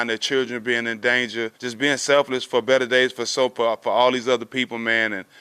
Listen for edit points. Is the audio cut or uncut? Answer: cut